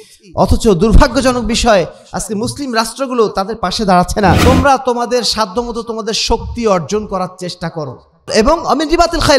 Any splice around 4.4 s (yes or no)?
yes